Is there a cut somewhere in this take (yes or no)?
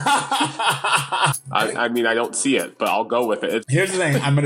yes